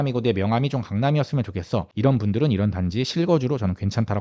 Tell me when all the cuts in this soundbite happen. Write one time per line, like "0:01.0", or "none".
0:01.9